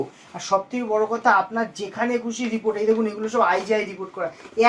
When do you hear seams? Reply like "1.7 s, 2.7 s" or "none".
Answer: none